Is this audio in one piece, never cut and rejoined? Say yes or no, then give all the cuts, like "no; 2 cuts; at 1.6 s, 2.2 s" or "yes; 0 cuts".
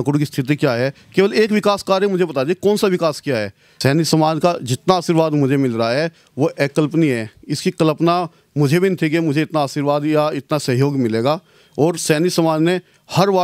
no; 1 cut; at 3.6 s